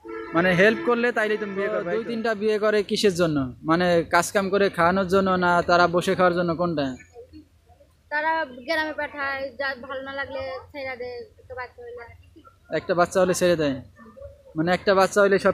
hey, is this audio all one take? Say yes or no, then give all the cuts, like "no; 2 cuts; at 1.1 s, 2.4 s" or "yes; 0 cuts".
no; 1 cut; at 1.8 s